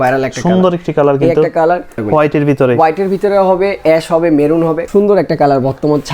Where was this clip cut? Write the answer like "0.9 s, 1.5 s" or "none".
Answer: 2.0 s, 4.8 s